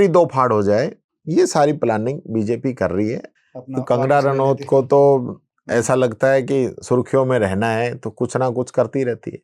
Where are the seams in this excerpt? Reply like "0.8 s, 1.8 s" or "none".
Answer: 3.3 s